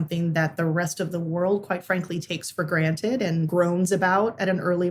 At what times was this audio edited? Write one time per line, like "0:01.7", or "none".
0:03.5